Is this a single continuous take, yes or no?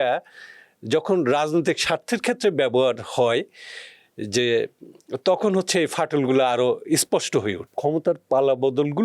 no